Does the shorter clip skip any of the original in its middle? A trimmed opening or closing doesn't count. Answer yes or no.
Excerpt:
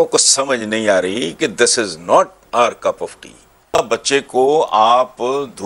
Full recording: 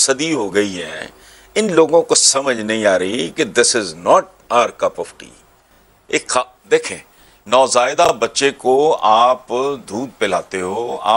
yes